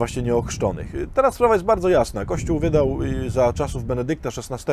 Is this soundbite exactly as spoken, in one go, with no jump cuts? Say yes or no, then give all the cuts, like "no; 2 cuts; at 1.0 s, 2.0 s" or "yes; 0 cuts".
no; 1 cut; at 2.3 s